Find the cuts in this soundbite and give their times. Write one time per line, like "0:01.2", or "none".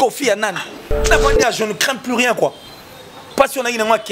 0:01.1

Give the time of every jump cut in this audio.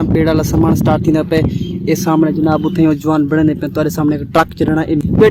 none

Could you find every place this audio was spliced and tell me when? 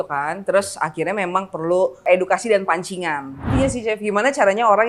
0:02.1
0:03.5

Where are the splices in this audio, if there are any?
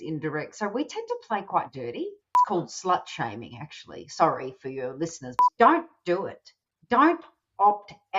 0:02.5
0:05.2

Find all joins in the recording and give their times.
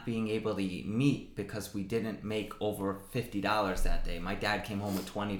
none

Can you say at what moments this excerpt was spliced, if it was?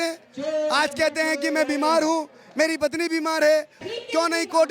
0:03.8

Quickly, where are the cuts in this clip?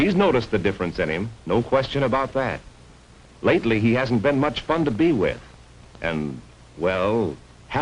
0:05.1

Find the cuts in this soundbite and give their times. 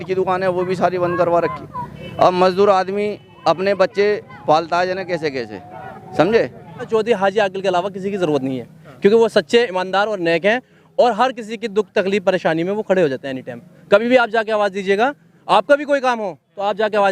0:06.8

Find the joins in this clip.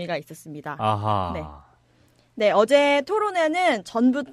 0:03.2

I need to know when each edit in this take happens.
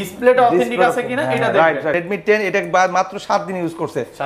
0:02.0

